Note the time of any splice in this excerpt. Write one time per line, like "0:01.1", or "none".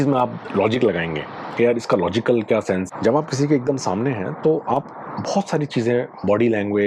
0:02.9

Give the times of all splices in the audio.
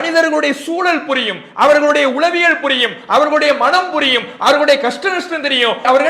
none

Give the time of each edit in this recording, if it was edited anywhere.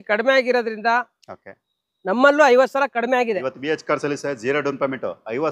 0:03.5

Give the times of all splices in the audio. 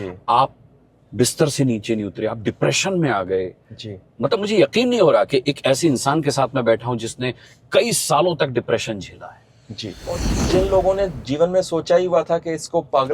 0:10.3

